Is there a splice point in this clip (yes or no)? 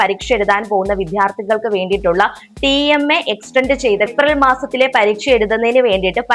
yes